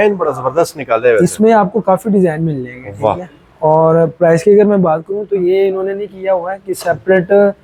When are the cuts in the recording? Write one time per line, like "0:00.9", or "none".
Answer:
none